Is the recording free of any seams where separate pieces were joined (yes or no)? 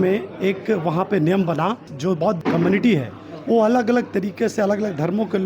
no